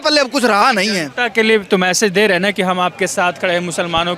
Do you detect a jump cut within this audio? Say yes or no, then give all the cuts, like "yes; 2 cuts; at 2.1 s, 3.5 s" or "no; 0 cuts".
no; 0 cuts